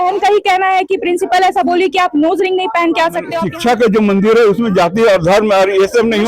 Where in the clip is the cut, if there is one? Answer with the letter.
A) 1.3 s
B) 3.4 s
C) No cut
B